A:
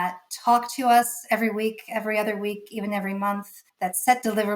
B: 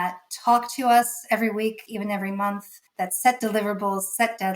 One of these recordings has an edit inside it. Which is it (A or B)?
B